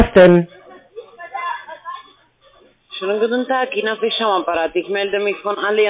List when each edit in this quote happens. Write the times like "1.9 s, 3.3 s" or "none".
none